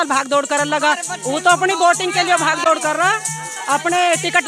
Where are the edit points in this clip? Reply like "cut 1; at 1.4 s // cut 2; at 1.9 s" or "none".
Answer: none